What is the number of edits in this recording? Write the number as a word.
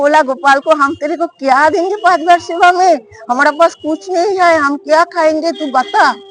zero